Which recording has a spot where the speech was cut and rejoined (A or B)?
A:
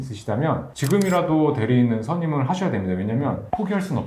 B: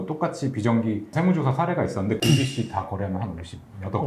B